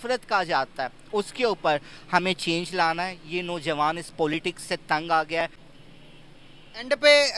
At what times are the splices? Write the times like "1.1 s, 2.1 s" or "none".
5.6 s